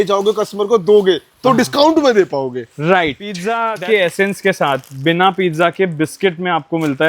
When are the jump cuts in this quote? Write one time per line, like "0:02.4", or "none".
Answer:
0:03.7